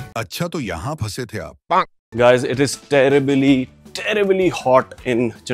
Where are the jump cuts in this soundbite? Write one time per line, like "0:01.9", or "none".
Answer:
0:02.0